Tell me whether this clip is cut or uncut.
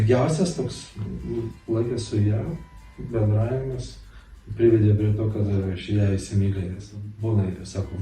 cut